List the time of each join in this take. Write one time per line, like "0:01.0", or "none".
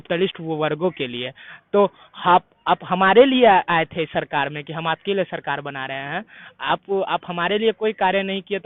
none